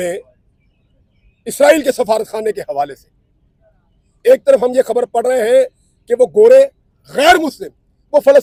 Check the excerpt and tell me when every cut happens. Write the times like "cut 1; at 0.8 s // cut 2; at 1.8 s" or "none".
none